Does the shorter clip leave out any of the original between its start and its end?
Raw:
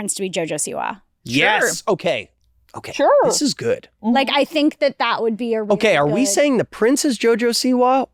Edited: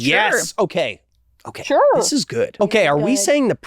yes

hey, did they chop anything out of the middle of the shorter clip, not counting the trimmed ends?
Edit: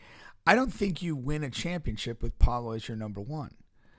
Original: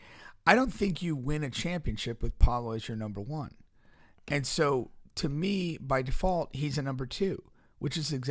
no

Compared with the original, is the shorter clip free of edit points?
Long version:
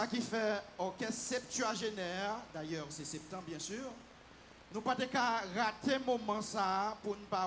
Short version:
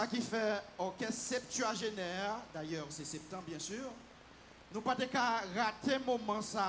yes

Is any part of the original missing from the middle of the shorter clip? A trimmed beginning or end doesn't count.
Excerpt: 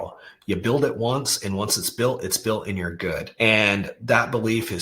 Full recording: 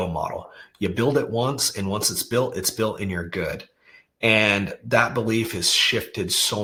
yes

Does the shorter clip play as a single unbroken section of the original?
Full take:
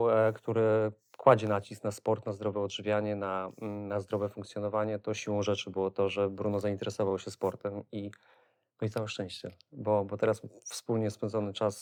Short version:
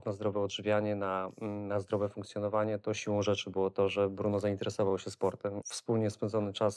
no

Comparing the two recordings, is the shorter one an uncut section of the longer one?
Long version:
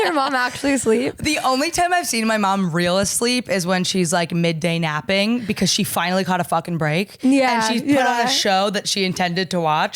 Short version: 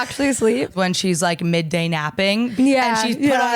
no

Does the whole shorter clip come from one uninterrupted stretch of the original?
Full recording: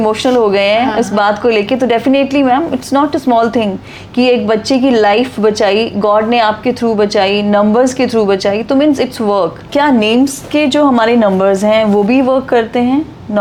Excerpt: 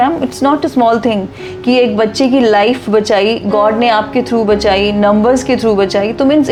yes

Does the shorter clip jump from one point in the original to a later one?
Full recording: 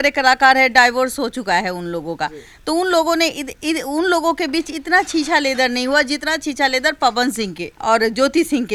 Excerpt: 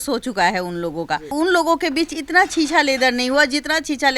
yes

